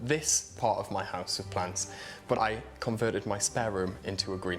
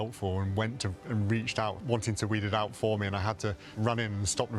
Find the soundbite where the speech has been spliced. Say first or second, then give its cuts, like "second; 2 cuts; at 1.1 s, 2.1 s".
first; 1 cut; at 2.4 s